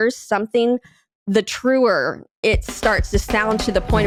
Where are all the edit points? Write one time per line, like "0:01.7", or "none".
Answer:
none